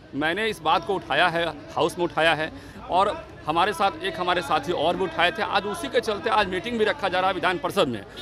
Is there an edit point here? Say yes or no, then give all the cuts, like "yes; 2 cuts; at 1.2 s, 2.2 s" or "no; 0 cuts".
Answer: no; 0 cuts